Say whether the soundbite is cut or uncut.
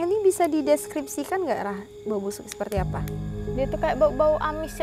cut